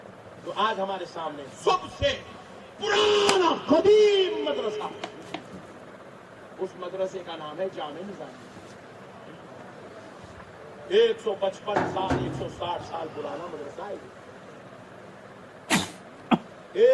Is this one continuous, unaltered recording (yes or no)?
no